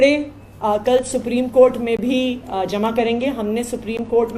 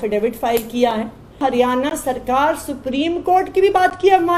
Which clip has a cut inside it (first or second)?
second